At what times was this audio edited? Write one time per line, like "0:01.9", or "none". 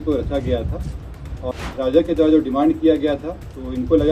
0:01.4